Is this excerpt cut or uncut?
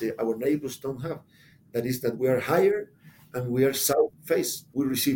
cut